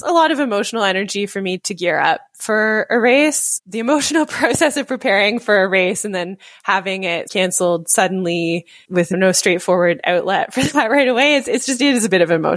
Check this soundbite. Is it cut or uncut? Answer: cut